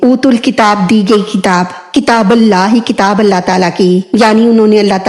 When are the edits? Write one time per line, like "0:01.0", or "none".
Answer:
0:01.8